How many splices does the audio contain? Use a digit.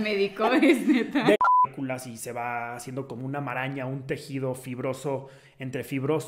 1